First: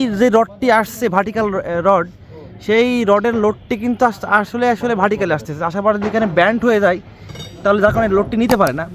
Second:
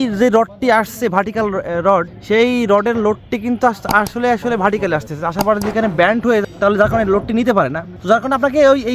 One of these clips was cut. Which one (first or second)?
second